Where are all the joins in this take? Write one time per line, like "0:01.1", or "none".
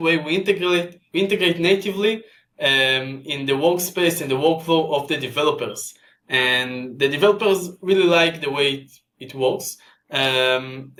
none